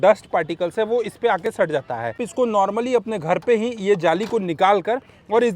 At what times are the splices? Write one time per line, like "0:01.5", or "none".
0:02.2